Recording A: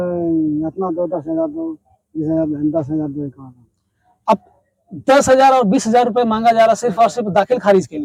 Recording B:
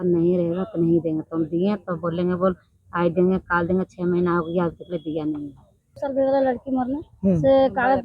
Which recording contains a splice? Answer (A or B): B